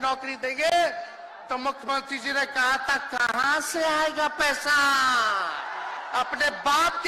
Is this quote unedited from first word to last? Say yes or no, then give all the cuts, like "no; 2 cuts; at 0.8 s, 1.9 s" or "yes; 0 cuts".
no; 1 cut; at 6.0 s